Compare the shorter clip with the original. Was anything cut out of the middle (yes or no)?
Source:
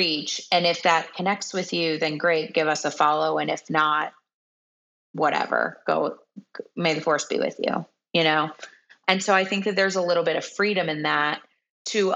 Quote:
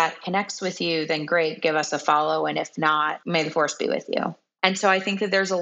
yes